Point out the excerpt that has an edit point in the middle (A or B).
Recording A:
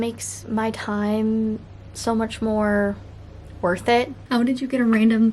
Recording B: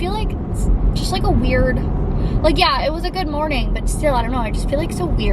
A